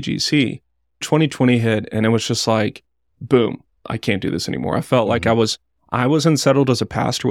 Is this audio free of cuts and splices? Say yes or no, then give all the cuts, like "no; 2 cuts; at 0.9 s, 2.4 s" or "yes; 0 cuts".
no; 2 cuts; at 1.0 s, 3.8 s